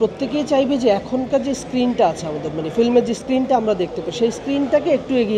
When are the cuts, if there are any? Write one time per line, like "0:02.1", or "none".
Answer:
none